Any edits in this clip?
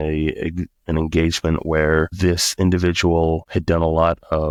no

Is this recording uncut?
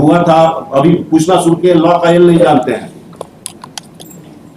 yes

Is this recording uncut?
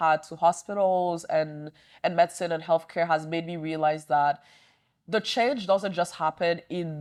yes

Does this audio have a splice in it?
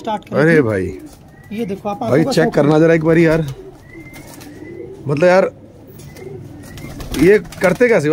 no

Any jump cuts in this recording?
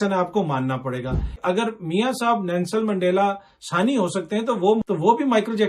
yes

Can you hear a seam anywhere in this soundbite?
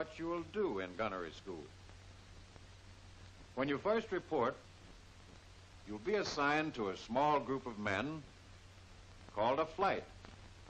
yes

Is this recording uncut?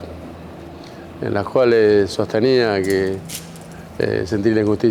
yes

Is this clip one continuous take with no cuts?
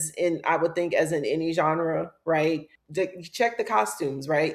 no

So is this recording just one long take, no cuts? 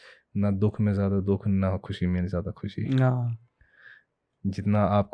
yes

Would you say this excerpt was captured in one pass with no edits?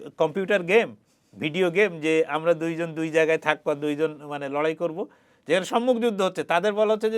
yes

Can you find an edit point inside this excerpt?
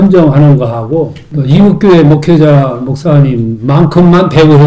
no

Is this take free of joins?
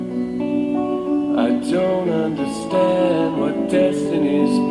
yes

